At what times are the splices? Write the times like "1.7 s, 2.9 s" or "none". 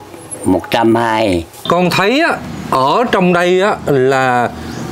1.6 s